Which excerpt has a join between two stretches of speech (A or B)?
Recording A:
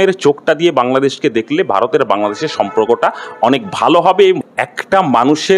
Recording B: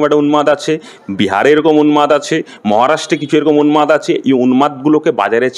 A